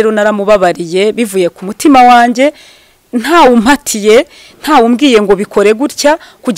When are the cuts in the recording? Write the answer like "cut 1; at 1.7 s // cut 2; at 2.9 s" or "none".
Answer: none